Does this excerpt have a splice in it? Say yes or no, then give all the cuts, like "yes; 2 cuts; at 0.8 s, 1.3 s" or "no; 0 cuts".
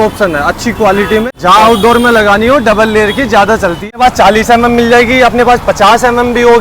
yes; 2 cuts; at 1.2 s, 3.9 s